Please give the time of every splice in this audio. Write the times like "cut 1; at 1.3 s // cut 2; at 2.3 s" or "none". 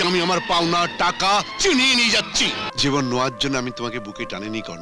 cut 1; at 2.6 s